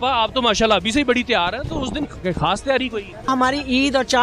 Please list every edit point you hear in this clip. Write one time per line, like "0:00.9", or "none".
0:03.3